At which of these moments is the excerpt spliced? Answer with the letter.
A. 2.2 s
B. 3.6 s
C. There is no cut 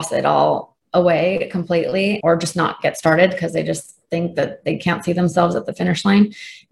A